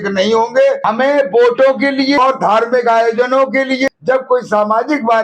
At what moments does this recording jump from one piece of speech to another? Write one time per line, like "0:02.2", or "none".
0:00.8
0:02.2
0:03.9